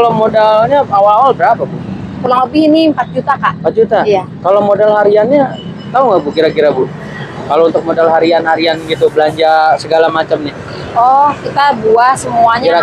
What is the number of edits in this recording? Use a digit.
0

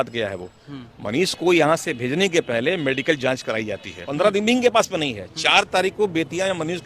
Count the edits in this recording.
1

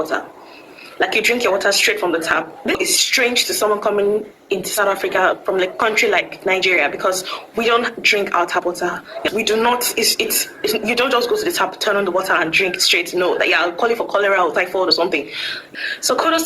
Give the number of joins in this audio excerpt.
3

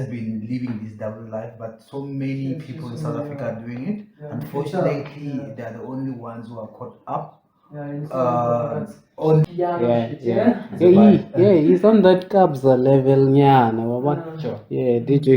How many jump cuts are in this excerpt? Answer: 1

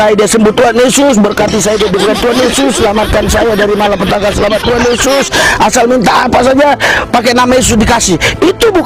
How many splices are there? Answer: 0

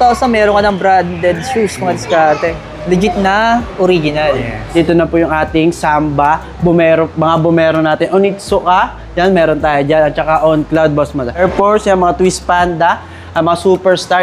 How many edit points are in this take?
2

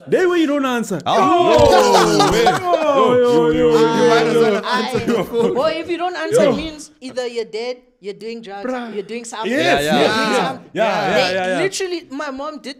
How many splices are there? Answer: 0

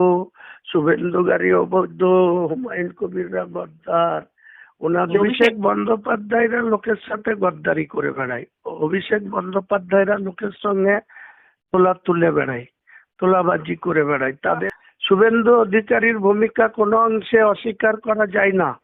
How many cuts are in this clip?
2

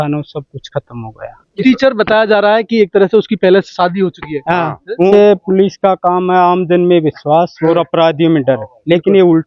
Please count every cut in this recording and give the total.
2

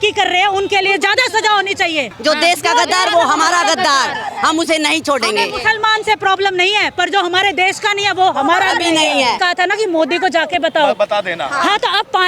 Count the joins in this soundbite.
2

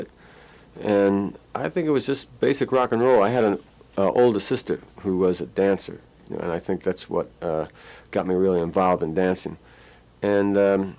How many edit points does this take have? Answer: 1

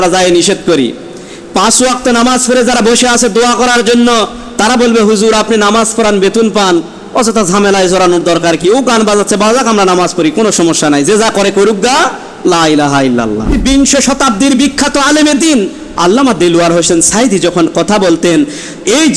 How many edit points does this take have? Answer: 1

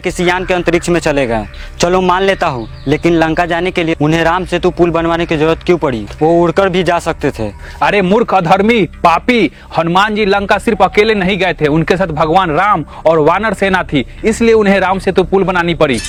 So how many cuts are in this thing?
0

